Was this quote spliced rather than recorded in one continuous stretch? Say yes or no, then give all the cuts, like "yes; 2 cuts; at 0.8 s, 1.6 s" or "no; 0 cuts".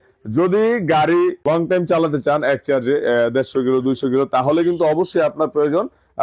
yes; 1 cut; at 1.4 s